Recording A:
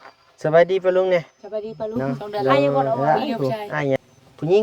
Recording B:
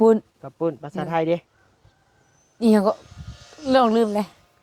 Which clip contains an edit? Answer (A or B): A